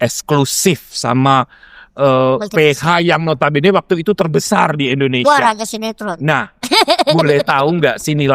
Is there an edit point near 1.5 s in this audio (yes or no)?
no